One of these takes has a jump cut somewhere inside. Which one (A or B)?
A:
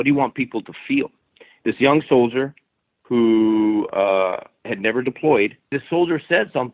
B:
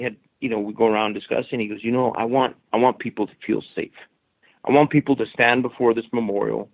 A